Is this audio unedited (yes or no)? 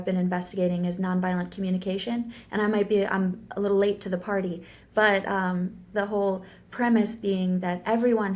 yes